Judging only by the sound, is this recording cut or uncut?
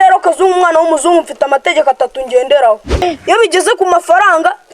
cut